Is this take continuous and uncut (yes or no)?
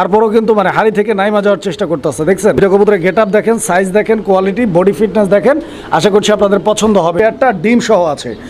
no